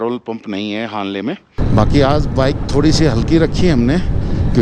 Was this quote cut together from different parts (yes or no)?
yes